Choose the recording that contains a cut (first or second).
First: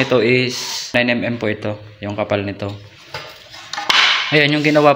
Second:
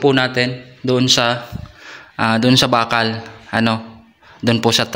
first